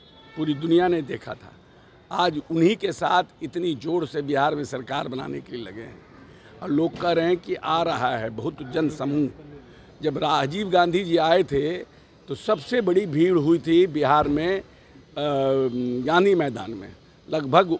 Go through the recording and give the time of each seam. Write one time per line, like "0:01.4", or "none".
none